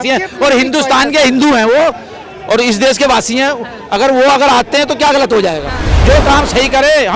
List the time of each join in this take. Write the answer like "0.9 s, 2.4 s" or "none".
5.9 s

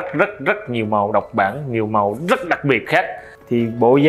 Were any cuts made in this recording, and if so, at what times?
2.9 s

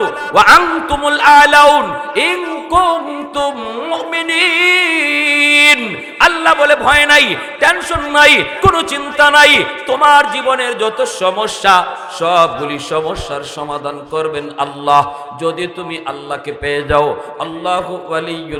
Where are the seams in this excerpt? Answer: none

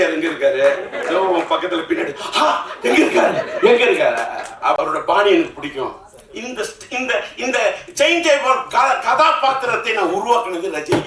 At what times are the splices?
4.8 s

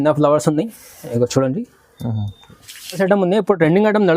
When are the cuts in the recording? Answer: 3.0 s

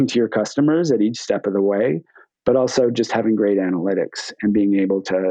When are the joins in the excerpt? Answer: none

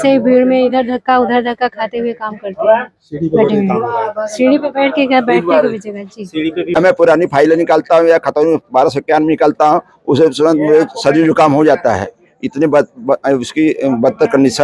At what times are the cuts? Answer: 6.8 s

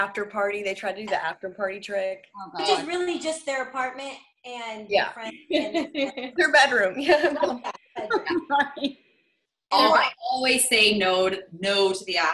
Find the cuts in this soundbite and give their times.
none

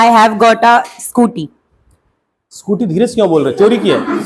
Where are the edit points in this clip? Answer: none

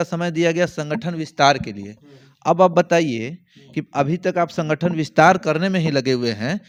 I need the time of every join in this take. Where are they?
none

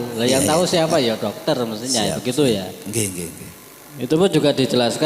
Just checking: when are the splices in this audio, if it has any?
none

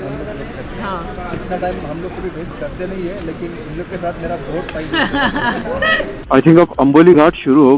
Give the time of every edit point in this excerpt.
6.2 s

